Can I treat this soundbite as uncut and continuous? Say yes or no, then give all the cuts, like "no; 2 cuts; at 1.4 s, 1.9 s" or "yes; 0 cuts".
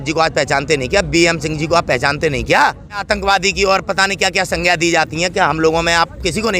no; 1 cut; at 3.0 s